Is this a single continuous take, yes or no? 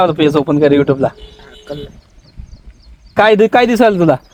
yes